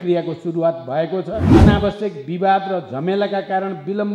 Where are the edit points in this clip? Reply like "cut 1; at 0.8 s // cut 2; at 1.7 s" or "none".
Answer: cut 1; at 1.5 s